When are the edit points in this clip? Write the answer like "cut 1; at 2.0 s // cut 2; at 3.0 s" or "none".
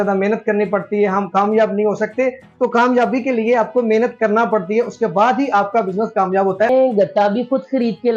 cut 1; at 6.7 s